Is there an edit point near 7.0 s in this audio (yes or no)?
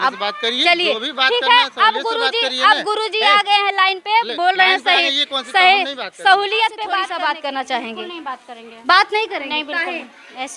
yes